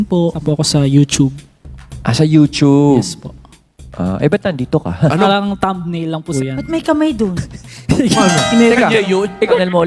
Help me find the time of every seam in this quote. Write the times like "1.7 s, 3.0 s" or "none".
5.1 s, 8.2 s